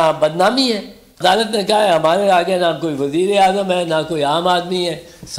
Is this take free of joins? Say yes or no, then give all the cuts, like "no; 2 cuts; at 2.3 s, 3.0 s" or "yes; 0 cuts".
no; 1 cut; at 1.2 s